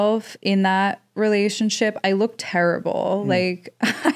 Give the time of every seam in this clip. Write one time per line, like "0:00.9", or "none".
none